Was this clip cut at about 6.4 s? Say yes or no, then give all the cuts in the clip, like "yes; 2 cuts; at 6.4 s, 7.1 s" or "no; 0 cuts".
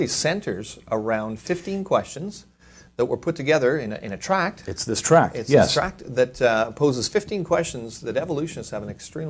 yes; 1 cut; at 6.4 s